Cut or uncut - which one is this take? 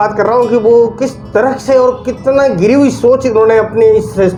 uncut